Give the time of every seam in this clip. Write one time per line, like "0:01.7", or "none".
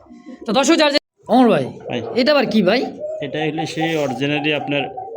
0:01.0